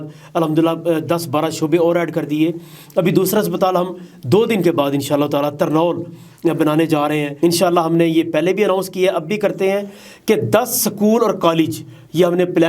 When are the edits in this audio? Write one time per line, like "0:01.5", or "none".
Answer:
0:07.3